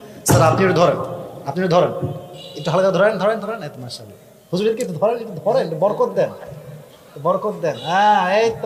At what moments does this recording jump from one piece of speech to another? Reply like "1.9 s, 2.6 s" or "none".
none